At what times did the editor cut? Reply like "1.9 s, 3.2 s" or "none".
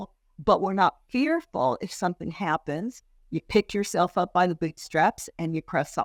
none